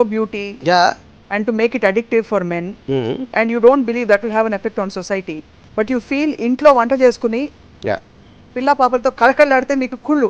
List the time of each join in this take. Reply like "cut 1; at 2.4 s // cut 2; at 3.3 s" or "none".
none